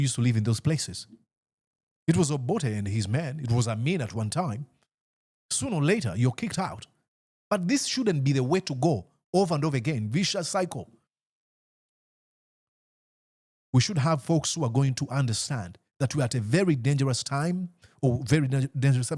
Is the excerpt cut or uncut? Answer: uncut